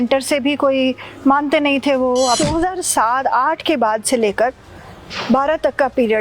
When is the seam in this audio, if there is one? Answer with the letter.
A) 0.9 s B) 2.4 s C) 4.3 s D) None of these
B